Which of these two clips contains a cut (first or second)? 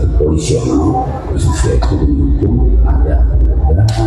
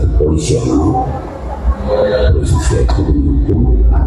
first